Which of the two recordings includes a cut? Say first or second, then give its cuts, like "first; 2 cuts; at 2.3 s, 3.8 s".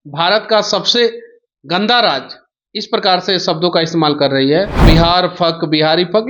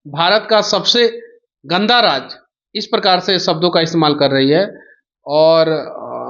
first; 1 cut; at 4.8 s